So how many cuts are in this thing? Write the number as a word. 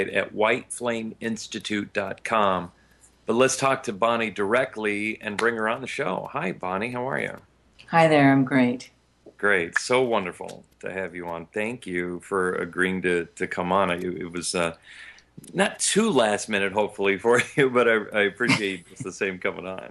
zero